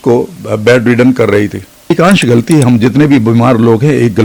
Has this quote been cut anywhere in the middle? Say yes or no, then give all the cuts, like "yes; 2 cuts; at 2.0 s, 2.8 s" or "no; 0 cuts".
yes; 1 cut; at 1.9 s